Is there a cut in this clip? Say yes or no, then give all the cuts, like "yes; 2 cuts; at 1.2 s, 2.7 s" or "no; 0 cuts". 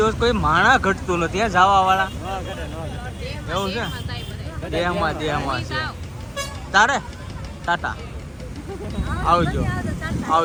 no; 0 cuts